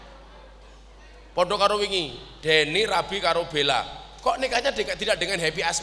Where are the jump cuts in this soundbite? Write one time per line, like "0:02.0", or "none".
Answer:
none